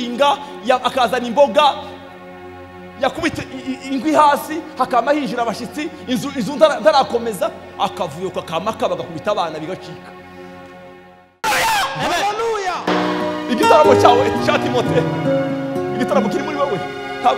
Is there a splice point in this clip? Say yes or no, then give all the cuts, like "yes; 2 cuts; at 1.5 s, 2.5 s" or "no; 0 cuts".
yes; 1 cut; at 11.5 s